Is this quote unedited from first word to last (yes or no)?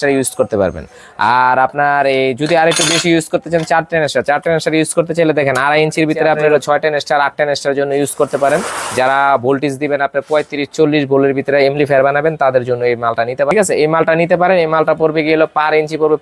no